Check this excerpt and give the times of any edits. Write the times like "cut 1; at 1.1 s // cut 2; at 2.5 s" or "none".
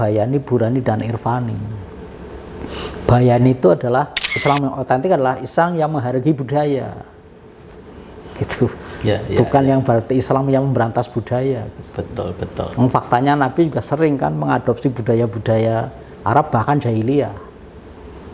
cut 1; at 4.3 s